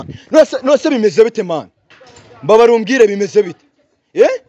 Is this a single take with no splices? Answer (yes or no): yes